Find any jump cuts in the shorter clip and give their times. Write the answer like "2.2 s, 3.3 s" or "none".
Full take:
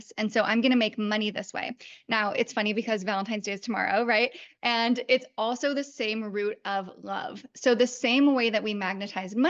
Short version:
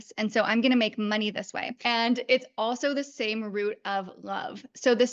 1.7 s